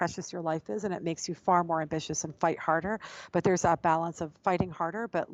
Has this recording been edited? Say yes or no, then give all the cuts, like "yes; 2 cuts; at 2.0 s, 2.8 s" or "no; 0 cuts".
no; 0 cuts